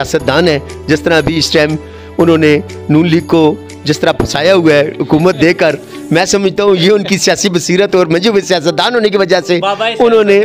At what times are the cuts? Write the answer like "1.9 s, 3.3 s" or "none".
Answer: none